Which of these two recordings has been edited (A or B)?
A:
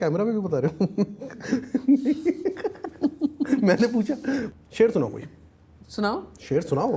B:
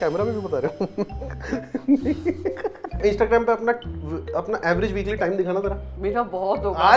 B